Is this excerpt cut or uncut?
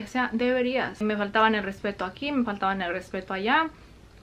cut